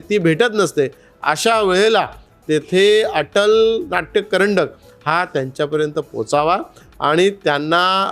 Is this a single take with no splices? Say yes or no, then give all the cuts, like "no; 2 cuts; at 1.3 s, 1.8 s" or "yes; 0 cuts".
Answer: yes; 0 cuts